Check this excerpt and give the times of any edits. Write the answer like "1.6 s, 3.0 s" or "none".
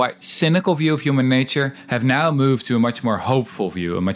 none

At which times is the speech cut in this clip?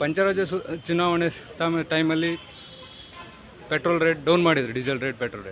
none

